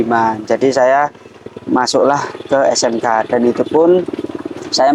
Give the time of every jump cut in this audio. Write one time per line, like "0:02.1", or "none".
none

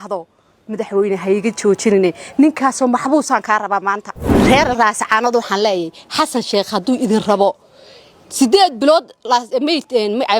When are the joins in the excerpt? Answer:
0:04.4

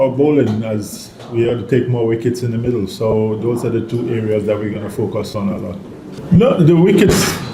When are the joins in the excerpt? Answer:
0:06.1

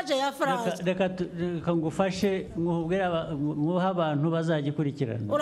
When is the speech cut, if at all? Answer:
none

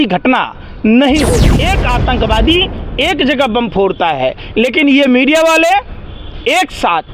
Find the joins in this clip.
0:01.5

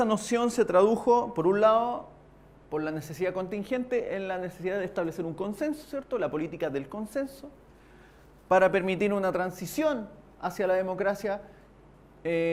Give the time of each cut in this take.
none

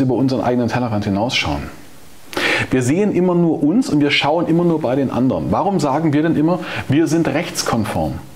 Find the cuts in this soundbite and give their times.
none

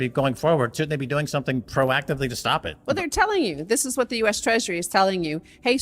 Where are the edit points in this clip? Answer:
0:02.7

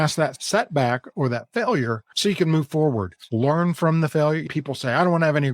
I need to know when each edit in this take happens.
0:02.1
0:03.2
0:04.4

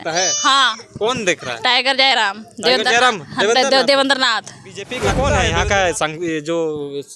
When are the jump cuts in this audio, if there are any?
0:05.1

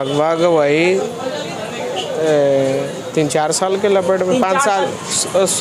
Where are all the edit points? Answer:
none

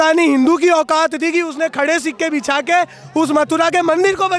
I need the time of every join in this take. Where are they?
none

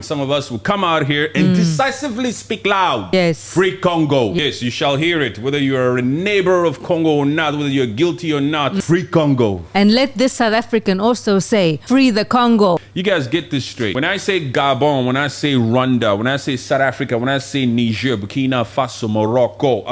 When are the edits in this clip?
0:03.1
0:04.4
0:08.8
0:11.8
0:12.9
0:13.9

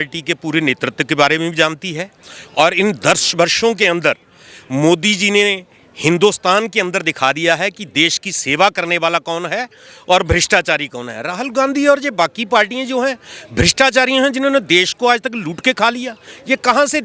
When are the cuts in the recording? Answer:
none

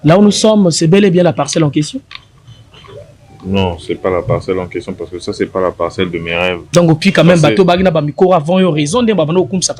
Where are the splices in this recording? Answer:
0:06.7

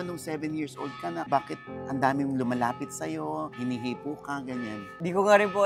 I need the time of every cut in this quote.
0:01.3

